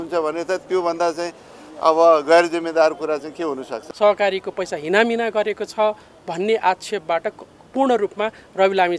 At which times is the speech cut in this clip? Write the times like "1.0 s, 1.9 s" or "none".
3.8 s